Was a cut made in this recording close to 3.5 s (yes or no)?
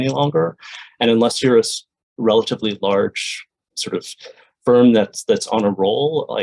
yes